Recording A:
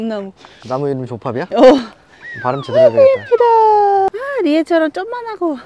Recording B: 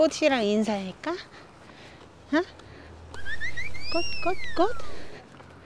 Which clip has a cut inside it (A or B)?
A